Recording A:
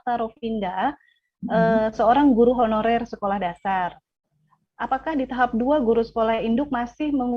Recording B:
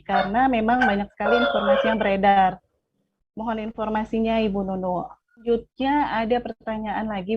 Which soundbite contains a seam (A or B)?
B